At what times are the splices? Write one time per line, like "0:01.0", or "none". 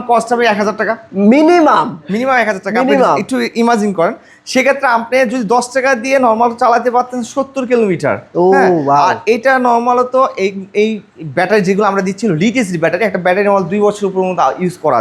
none